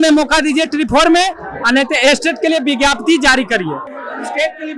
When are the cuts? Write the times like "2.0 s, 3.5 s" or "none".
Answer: none